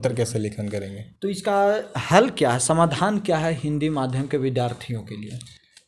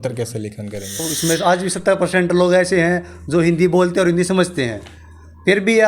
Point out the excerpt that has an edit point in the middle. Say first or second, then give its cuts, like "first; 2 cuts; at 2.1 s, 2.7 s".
second; 1 cut; at 1.1 s